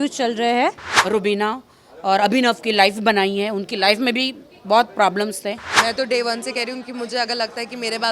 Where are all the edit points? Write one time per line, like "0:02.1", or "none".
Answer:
0:00.9
0:05.7